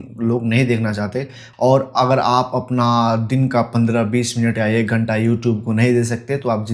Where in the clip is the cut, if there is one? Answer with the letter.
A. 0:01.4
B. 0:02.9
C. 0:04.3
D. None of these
A